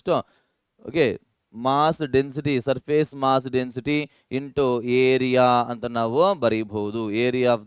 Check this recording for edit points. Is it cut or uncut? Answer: uncut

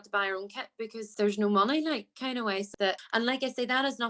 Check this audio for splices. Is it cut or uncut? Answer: cut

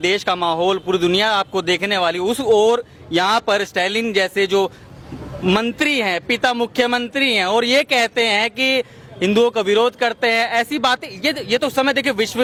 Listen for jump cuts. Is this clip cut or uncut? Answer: uncut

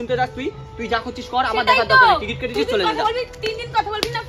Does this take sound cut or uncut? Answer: uncut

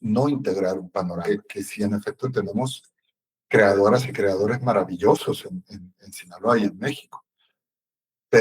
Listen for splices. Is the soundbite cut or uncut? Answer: cut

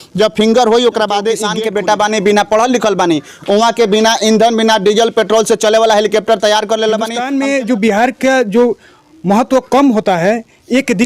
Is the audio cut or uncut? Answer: cut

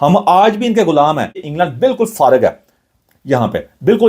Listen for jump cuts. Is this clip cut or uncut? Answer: cut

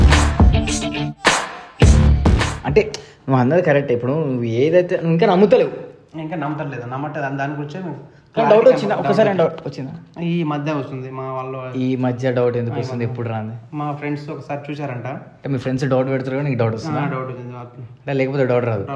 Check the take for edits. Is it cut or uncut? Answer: uncut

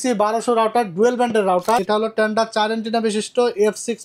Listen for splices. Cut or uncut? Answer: cut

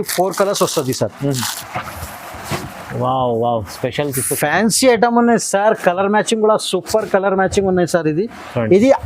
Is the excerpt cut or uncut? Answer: cut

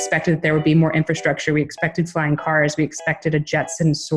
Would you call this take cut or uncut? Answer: uncut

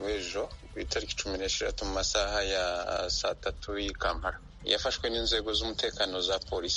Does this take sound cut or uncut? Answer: uncut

